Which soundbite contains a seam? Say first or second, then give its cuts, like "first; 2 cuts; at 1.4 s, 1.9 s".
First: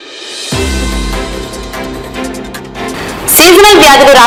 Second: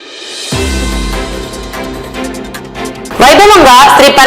second; 1 cut; at 2.8 s